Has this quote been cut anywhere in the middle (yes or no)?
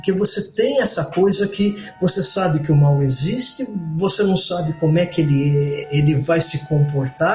no